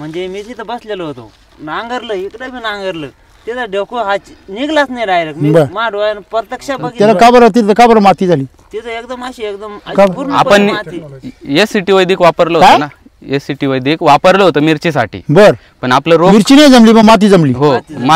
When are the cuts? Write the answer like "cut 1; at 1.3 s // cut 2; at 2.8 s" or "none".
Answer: cut 1; at 6.8 s